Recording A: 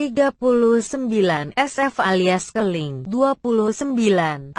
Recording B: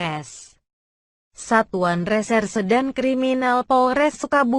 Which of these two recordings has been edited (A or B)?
B